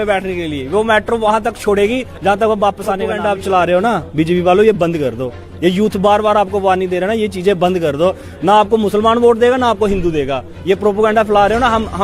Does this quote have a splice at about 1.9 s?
no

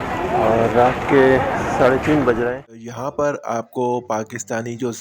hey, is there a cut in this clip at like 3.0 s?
yes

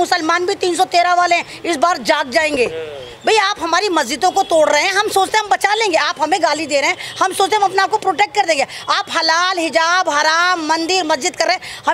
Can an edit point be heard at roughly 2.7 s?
no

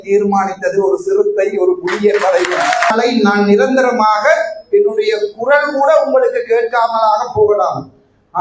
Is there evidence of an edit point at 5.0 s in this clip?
no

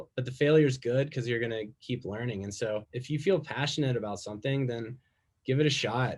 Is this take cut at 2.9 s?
yes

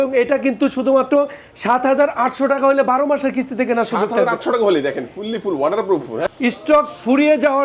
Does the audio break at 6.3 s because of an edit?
yes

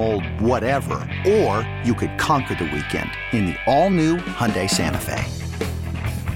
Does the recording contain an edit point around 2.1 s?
no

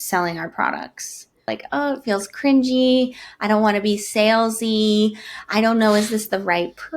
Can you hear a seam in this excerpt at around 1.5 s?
yes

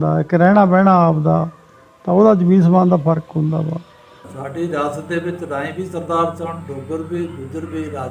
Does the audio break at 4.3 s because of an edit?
yes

